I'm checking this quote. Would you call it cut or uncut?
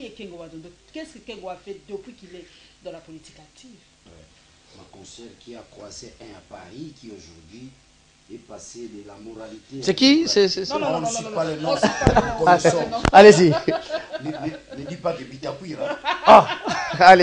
cut